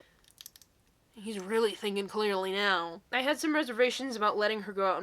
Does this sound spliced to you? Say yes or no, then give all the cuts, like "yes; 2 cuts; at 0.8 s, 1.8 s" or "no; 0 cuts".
yes; 1 cut; at 2.9 s